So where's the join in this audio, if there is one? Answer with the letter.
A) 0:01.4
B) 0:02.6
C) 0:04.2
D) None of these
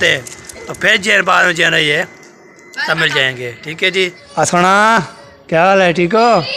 C